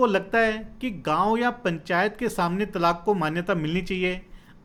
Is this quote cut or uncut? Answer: uncut